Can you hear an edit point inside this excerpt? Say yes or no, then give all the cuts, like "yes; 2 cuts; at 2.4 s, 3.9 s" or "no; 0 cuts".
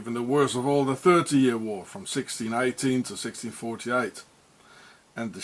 yes; 1 cut; at 1.3 s